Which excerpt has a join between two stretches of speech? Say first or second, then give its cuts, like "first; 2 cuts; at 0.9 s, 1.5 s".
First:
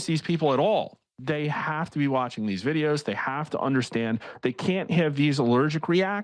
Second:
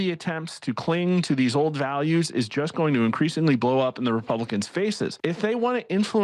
second; 1 cut; at 5.1 s